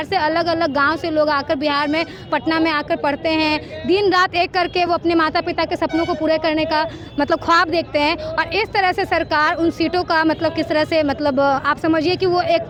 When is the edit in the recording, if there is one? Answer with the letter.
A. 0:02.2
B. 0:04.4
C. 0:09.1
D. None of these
D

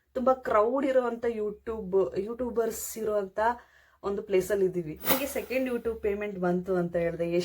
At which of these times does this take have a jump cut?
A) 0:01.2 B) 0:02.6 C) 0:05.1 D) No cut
C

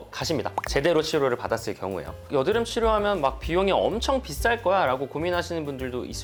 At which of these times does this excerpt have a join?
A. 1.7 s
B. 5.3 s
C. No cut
C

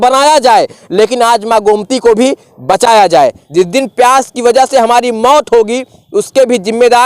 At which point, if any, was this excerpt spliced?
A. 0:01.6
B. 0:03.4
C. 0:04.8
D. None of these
B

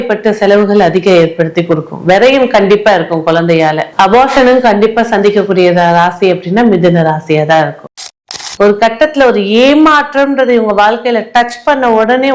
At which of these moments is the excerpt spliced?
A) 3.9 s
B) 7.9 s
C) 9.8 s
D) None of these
B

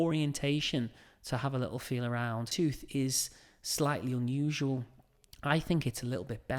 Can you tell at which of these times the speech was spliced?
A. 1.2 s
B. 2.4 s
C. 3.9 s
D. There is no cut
B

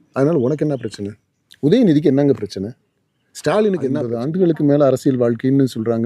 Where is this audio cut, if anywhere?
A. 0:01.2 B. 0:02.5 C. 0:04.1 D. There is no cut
C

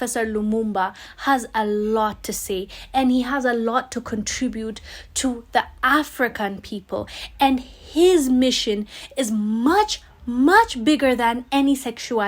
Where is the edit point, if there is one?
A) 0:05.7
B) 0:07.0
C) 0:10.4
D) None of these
D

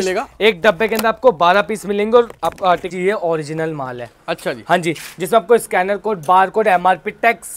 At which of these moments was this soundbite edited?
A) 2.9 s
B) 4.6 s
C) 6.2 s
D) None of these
A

